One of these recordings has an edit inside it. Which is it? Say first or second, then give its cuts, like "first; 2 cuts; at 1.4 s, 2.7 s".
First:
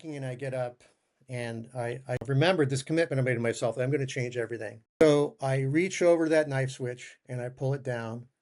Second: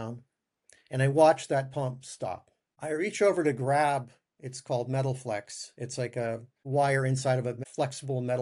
first; 2 cuts; at 2.2 s, 4.9 s